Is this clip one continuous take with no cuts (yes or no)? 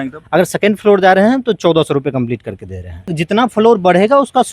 no